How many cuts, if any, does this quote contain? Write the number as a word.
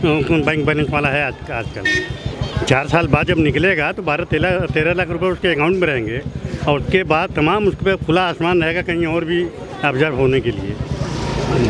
zero